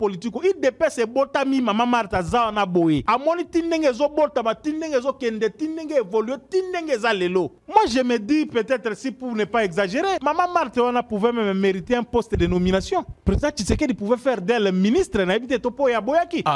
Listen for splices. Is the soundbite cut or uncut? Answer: cut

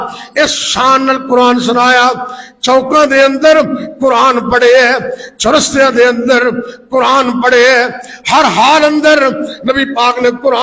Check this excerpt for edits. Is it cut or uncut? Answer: uncut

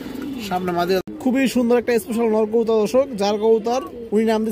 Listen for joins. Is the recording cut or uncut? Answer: cut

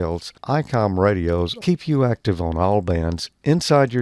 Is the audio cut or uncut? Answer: cut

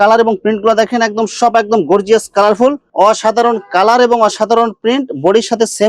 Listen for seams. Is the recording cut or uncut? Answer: cut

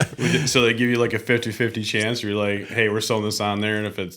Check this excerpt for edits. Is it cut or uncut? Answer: uncut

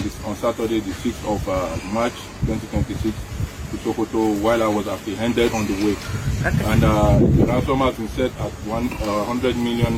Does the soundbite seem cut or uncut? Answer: uncut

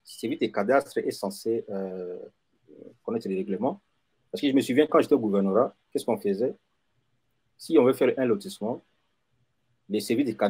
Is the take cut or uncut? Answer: uncut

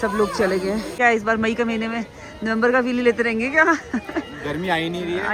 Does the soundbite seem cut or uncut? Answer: cut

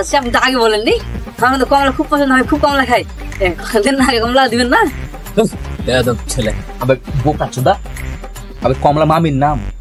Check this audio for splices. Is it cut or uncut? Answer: uncut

